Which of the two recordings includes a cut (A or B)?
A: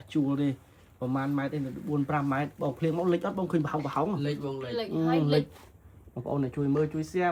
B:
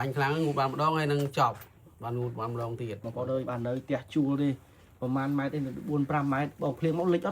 B